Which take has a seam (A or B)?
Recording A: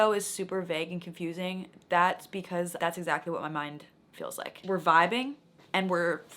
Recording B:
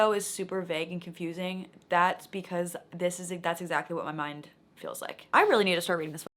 A